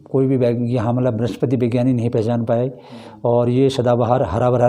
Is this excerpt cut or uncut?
uncut